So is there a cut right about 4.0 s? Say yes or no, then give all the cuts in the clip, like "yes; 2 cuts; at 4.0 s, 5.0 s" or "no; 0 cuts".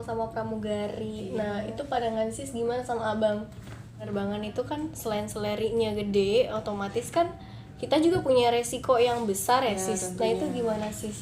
yes; 1 cut; at 4.0 s